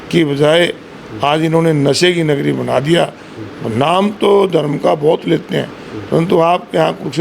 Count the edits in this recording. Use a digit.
0